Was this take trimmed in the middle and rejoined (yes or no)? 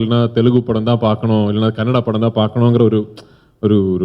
no